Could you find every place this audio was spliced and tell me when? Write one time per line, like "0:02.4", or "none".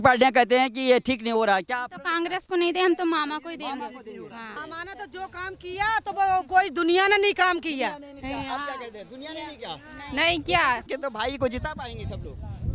0:04.6
0:10.9

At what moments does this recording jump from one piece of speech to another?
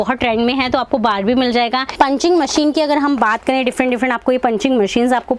0:01.8

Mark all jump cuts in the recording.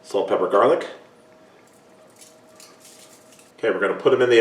0:03.2

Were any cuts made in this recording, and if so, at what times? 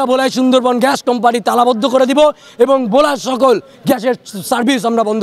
none

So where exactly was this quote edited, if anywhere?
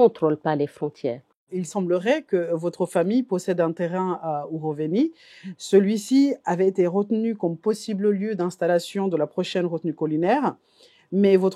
0:01.6

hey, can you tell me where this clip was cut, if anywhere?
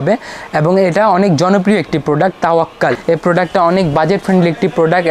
0:03.0

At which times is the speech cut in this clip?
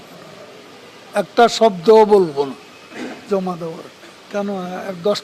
0:04.2

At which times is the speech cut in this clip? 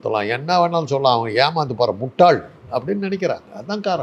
none

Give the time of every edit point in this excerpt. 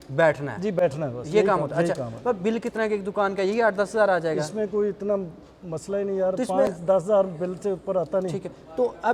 none

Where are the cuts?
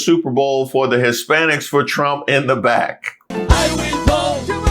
0:03.3

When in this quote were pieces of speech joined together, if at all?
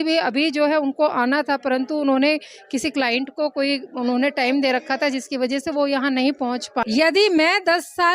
0:06.8

